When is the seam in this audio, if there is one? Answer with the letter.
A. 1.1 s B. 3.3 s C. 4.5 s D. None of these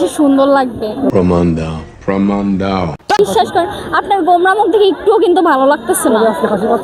D